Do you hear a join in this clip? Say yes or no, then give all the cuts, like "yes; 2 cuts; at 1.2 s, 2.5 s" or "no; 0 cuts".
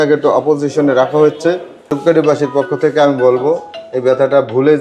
yes; 1 cut; at 2.0 s